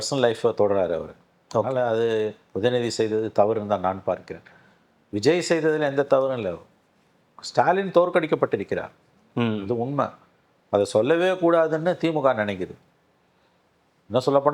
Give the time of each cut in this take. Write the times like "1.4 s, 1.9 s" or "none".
none